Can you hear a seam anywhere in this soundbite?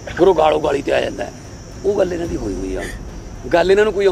no; 0 cuts

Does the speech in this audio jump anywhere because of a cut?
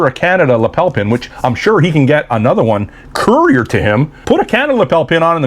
yes; 1 cut; at 4.1 s

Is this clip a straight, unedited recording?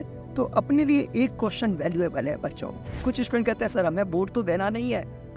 no; 1 cut; at 2.9 s

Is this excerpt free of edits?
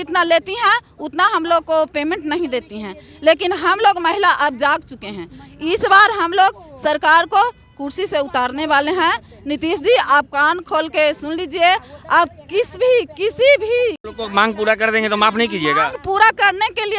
yes; 0 cuts

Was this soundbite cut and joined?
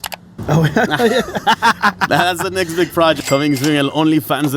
yes; 1 cut; at 3.2 s

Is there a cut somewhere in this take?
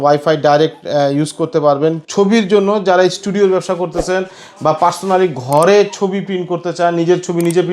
yes; 1 cut; at 2.0 s

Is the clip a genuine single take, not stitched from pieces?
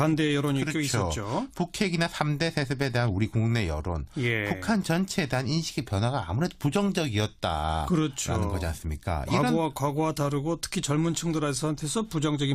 yes; 0 cuts

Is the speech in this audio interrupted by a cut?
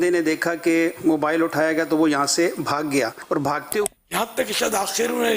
yes; 1 cut; at 3.8 s

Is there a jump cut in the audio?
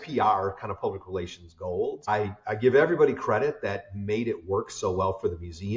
yes; 1 cut; at 2.1 s

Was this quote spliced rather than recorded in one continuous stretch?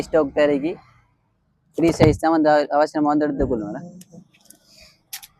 no; 0 cuts

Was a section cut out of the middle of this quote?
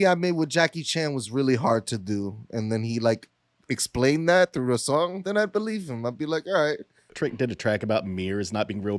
yes; 1 cut; at 7.0 s

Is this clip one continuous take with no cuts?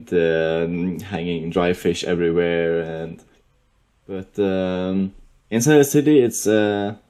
yes; 0 cuts

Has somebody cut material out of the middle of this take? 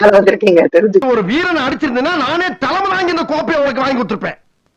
no; 0 cuts

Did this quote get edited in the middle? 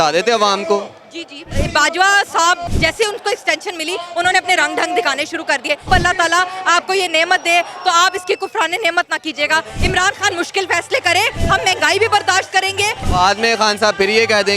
yes; 5 cuts; at 1.5 s, 2.7 s, 5.9 s, 11.4 s, 13.0 s

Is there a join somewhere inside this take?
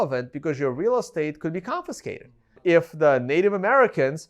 yes; 1 cut; at 2.6 s

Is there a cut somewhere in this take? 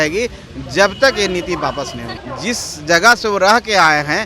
yes; 1 cut; at 2.2 s

